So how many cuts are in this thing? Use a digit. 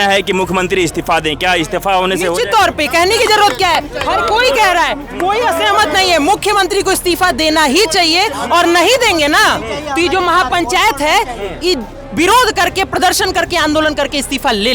0